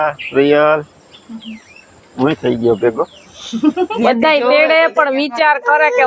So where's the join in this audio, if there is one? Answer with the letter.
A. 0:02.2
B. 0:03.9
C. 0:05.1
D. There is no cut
B